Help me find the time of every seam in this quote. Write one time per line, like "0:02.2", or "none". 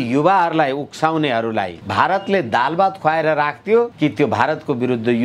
0:01.8
0:03.9